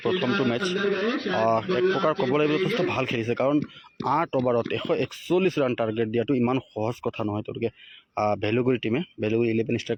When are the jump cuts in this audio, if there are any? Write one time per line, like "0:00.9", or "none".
none

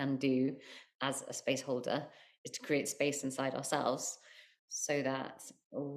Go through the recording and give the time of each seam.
none

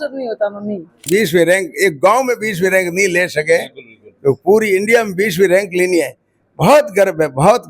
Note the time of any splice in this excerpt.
0:01.1

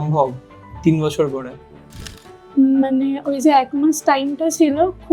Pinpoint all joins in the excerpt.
0:02.1

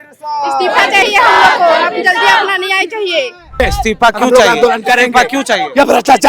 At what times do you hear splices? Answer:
0:03.6

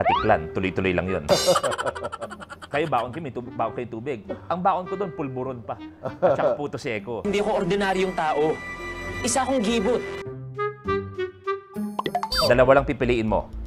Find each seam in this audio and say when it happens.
0:12.3

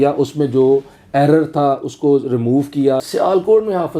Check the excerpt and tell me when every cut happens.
0:03.0

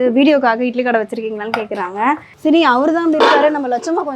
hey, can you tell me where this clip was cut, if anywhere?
0:02.3

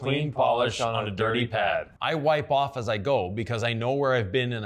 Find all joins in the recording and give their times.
0:01.9

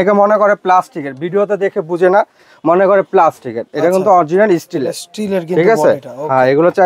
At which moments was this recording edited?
none

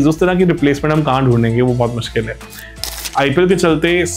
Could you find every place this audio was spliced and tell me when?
0:02.8

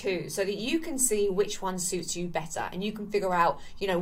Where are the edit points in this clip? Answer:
none

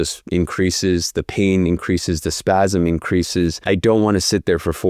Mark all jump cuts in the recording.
0:03.6

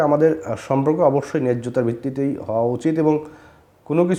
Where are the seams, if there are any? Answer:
none

